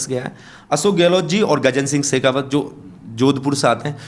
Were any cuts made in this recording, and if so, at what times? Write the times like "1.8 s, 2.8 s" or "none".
none